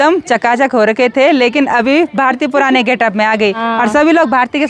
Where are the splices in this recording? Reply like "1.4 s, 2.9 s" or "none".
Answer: 3.6 s